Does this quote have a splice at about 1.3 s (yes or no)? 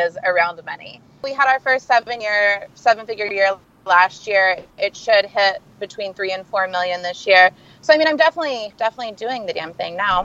yes